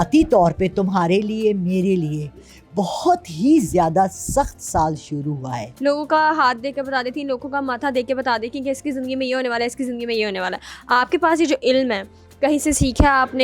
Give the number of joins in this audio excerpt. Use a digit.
1